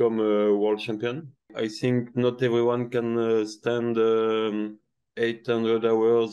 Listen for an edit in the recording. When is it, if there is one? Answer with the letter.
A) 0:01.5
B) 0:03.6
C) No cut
A